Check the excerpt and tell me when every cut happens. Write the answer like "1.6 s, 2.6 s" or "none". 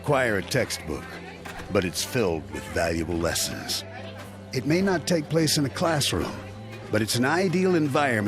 4.9 s